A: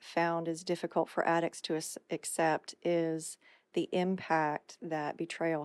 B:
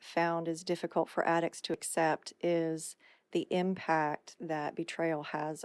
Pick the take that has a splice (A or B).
B